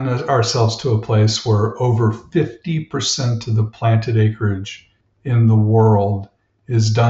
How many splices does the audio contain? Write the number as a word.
zero